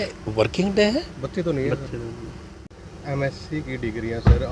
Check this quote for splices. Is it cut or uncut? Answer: cut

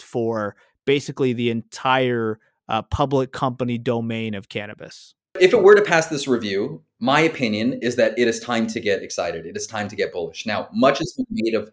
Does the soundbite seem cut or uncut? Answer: cut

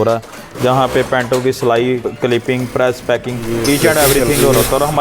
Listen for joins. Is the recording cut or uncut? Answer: cut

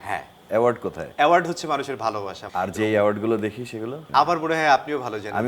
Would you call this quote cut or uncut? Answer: cut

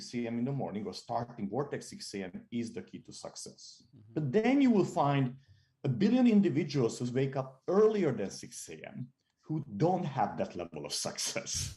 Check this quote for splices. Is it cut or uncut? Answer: uncut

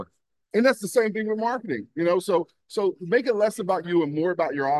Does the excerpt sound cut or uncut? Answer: uncut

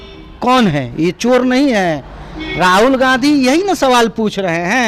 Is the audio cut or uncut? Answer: uncut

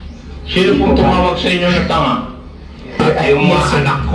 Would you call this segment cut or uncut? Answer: cut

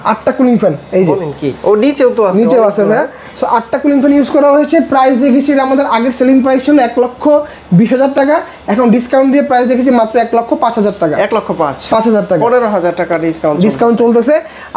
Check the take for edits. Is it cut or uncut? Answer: uncut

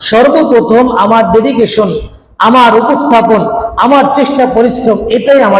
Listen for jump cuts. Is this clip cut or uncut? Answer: uncut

